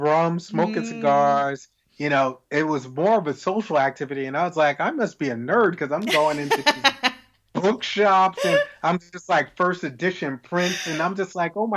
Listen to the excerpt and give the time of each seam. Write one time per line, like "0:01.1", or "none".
none

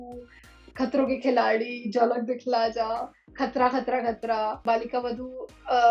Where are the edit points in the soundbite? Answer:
0:04.6

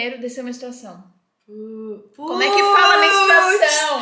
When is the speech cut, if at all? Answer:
none

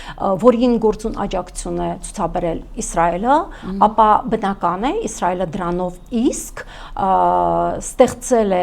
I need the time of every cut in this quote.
none

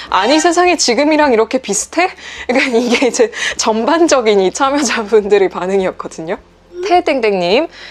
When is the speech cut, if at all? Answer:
none

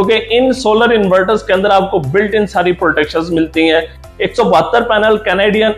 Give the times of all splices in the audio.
0:04.0

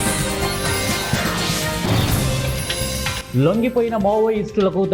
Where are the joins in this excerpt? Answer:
none

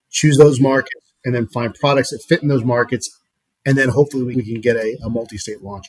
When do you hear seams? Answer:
0:04.3

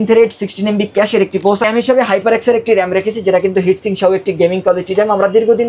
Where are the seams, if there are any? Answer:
0:01.6

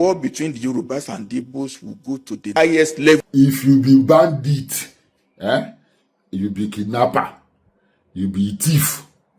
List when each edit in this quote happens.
0:02.5
0:03.3

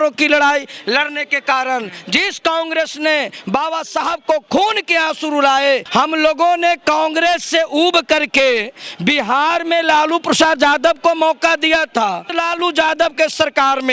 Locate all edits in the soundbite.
0:05.8
0:12.2

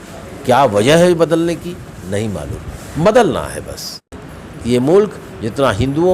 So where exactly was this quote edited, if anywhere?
0:04.0

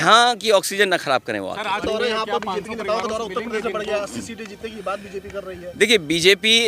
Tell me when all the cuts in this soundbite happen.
0:01.8

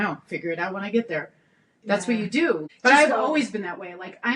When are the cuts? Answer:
0:02.6

